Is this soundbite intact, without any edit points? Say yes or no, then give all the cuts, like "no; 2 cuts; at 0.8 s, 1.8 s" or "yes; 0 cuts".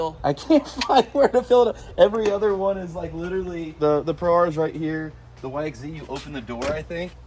yes; 0 cuts